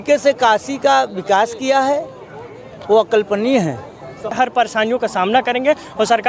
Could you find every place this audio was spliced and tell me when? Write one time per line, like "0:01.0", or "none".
0:04.3